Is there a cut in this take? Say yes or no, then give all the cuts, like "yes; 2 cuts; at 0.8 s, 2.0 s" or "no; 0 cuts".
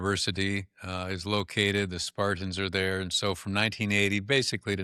no; 0 cuts